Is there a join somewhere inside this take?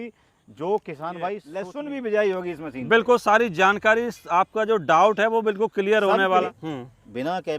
yes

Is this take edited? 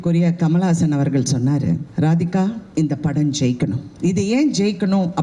yes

